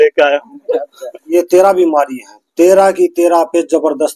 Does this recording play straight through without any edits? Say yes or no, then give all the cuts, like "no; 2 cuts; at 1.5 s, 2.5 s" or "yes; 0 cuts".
no; 1 cut; at 1.1 s